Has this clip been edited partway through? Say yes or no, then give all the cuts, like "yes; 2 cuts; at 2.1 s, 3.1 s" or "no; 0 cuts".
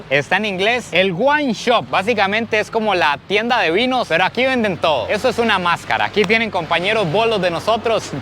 no; 0 cuts